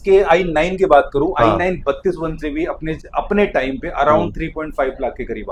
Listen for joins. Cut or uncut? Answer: uncut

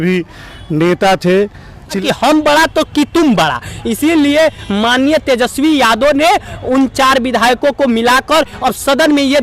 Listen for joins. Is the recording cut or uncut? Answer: cut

